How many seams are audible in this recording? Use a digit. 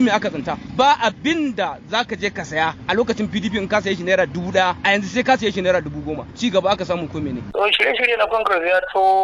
4